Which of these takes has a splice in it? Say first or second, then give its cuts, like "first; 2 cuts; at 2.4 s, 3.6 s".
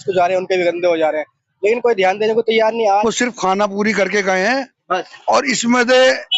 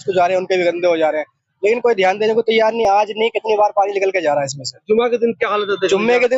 first; 1 cut; at 2.8 s